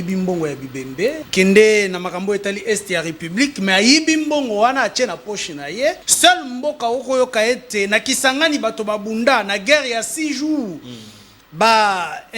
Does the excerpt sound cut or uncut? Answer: cut